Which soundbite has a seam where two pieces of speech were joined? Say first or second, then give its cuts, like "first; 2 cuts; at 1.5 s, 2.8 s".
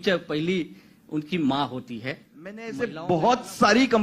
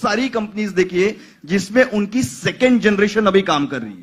first; 1 cut; at 2.7 s